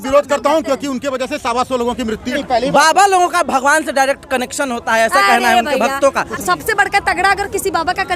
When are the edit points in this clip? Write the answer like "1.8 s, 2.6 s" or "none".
2.3 s, 6.3 s